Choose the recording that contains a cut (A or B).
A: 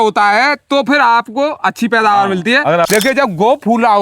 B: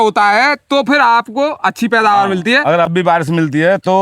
A